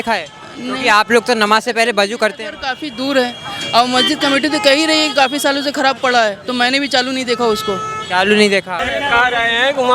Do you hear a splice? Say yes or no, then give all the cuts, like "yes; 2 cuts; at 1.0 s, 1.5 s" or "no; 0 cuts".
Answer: yes; 1 cut; at 8.8 s